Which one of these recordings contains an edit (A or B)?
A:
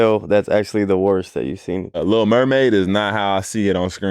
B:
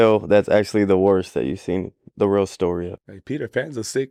A